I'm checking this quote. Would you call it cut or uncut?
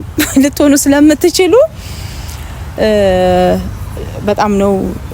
uncut